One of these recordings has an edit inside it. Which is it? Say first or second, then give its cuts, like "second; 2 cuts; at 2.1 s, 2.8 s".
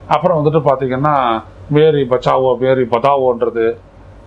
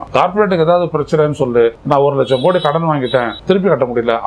second; 2 cuts; at 1.8 s, 3.3 s